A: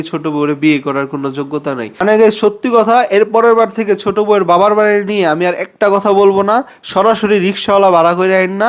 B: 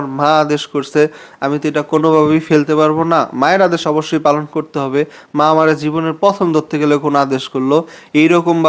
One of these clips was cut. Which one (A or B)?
A